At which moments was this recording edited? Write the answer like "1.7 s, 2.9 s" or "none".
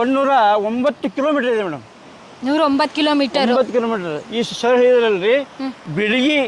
none